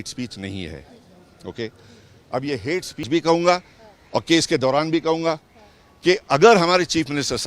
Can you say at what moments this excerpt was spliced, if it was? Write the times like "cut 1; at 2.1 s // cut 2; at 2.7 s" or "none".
cut 1; at 3.1 s